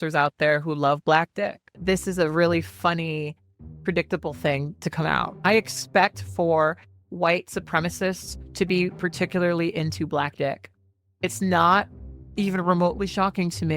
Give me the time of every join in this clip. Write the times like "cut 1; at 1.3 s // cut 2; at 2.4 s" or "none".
cut 1; at 1.7 s